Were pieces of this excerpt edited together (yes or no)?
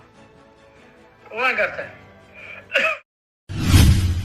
yes